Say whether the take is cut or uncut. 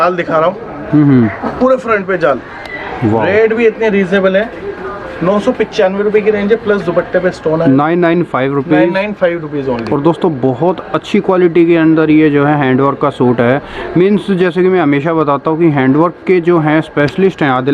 uncut